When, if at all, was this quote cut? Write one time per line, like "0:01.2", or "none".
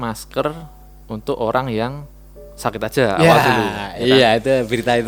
none